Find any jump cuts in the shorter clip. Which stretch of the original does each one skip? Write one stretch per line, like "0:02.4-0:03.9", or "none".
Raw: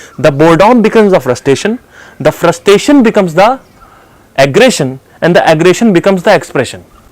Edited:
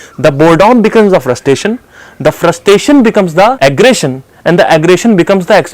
0:03.6-0:04.3